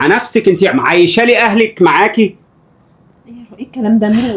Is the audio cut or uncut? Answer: uncut